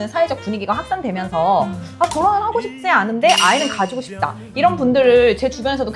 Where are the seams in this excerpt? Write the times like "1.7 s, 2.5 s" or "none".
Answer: none